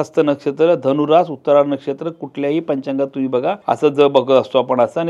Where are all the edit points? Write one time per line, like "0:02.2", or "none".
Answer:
0:03.6